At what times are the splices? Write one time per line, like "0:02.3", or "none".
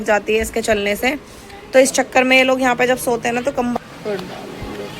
0:03.8